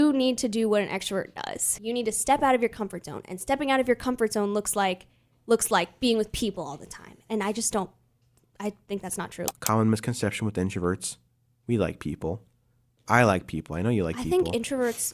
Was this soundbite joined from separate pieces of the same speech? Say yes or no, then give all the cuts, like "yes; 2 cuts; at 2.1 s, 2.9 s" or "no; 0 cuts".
yes; 2 cuts; at 1.8 s, 9.5 s